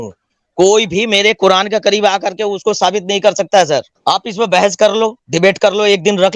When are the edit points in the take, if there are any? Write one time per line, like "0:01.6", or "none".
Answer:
0:03.9